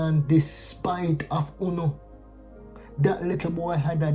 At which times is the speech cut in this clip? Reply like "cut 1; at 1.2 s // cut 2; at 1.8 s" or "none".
none